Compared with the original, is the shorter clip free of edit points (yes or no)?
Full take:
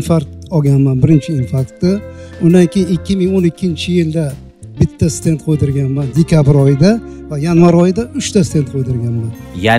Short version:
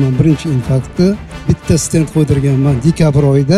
no